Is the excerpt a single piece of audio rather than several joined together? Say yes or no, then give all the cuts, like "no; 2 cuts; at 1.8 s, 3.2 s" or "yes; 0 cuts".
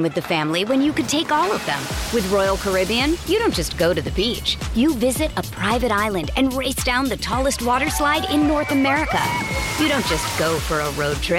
yes; 0 cuts